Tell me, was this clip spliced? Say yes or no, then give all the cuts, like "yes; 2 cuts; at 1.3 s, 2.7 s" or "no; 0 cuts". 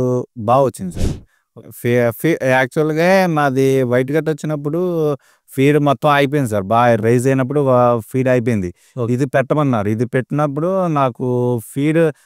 no; 0 cuts